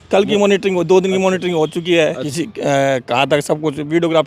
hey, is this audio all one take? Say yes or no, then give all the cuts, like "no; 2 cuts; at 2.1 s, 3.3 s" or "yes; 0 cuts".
no; 1 cut; at 2.2 s